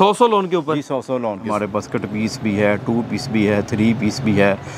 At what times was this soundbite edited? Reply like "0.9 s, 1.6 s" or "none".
1.5 s

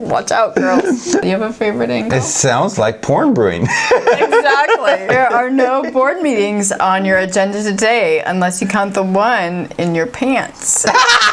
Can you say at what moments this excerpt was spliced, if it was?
1.2 s, 5.1 s

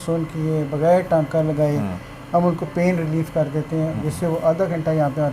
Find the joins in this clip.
none

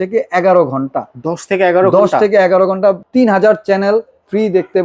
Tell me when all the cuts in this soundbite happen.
3.0 s

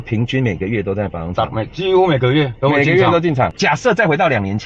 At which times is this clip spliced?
3.5 s

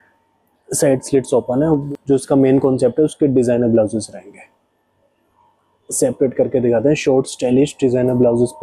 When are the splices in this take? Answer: 1.8 s

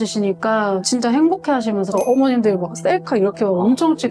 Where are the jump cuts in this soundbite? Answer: 0.8 s, 1.9 s

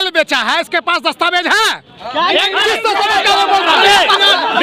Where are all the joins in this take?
none

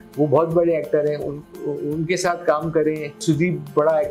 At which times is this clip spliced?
3.2 s

